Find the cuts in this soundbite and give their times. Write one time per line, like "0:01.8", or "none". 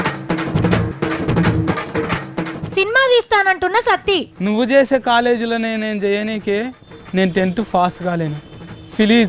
0:00.9